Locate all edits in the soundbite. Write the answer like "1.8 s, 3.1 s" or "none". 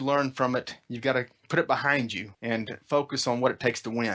1.5 s, 2.3 s